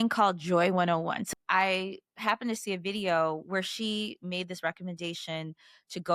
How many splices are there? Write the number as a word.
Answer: one